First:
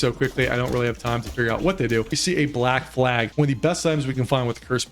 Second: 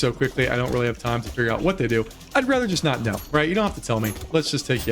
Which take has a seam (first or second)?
first